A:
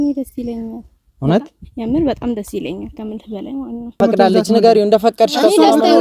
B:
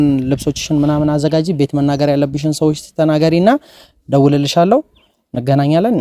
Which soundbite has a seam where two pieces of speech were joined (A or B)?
A